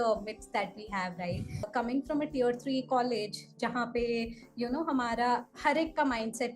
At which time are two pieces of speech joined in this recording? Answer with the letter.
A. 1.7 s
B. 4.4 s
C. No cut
A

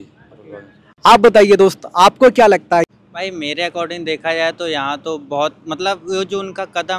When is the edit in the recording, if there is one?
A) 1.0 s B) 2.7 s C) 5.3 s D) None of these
D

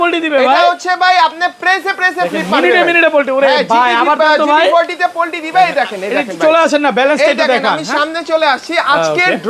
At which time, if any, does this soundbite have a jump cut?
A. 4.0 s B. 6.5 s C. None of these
C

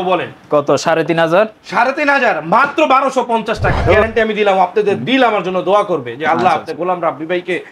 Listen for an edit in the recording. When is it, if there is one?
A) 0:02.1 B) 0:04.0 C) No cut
B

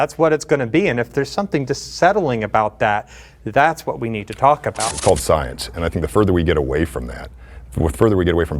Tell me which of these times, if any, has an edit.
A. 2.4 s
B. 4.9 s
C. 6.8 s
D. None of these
B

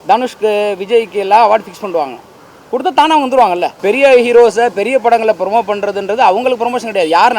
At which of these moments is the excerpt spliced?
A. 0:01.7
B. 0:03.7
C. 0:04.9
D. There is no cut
B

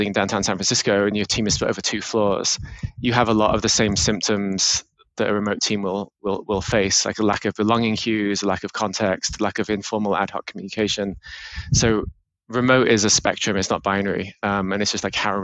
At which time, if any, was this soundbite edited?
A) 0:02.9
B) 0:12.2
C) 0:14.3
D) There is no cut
D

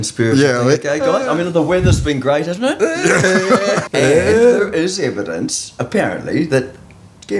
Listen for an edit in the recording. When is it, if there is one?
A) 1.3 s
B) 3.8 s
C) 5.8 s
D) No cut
B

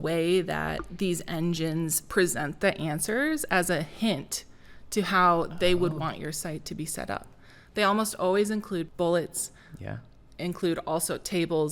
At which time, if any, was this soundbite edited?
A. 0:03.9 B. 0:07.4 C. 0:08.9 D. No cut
C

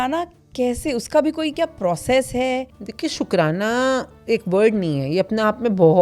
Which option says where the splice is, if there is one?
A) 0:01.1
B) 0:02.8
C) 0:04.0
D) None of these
B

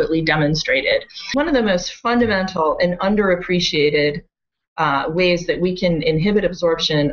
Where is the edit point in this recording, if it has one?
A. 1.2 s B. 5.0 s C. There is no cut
A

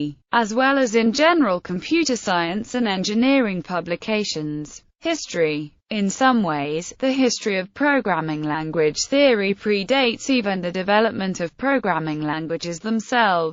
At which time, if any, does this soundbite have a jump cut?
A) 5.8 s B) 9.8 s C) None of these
B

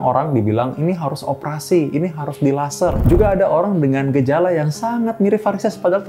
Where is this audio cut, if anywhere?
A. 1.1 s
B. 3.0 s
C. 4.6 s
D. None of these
B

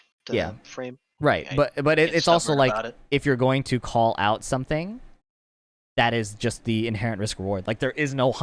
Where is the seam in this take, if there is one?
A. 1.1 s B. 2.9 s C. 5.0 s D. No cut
A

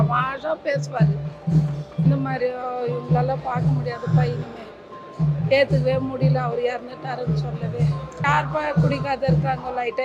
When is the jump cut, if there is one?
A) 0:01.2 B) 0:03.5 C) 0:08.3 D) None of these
C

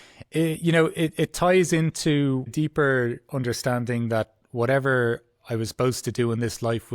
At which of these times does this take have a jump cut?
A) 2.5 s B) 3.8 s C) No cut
A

